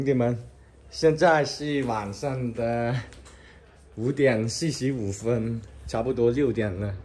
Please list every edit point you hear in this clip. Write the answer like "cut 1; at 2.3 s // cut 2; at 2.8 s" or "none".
none